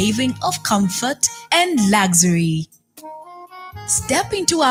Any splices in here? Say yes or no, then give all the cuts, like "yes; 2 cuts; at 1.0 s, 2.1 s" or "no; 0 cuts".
no; 0 cuts